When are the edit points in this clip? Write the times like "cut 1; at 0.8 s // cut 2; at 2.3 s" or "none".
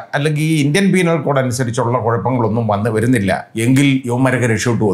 cut 1; at 3.5 s // cut 2; at 4.1 s